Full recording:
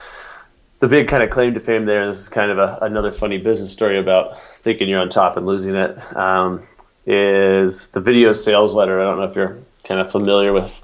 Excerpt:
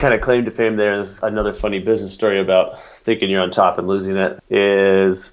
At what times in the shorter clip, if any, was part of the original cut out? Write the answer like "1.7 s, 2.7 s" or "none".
1.2 s, 4.4 s